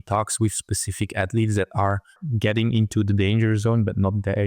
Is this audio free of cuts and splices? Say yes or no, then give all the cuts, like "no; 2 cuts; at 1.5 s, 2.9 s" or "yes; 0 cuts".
no; 1 cut; at 2.2 s